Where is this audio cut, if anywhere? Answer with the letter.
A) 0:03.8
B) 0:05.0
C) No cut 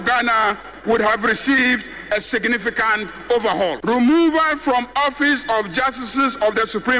A